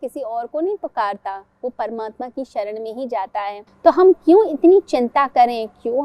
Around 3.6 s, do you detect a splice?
yes; 1 cut; at 3.6 s

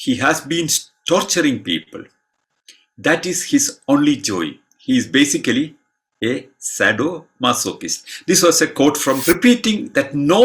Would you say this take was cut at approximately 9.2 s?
yes; 1 cut; at 9.2 s

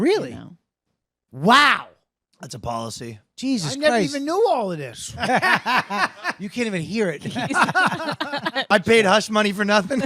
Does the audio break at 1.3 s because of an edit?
no; 1 cut; at 8.7 s

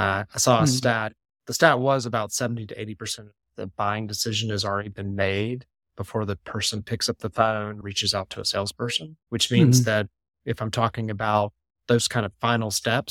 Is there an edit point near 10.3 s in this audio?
no; 2 cuts; at 7.8 s, 9.1 s

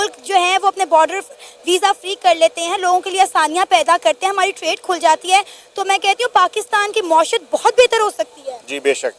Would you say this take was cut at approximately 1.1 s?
no; 0 cuts

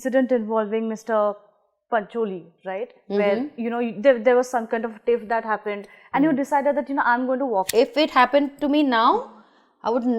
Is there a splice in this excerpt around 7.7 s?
yes; 1 cut; at 7.7 s

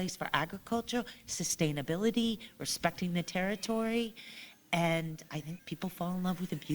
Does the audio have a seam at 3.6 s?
no; 1 cut; at 5.5 s

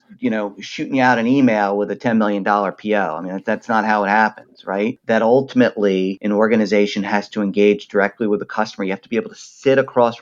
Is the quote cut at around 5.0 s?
yes; 2 cuts; at 5.0 s, 6.2 s

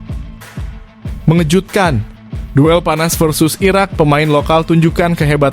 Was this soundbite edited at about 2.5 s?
no; 1 cut; at 1.3 s

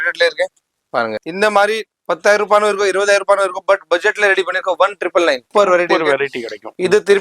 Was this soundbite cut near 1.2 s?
yes; 2 cuts; at 1.2 s, 5.4 s

